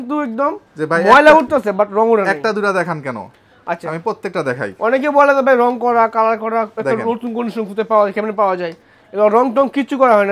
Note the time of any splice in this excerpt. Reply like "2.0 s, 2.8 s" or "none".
none